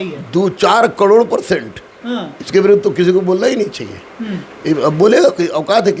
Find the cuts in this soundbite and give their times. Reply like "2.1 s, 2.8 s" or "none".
none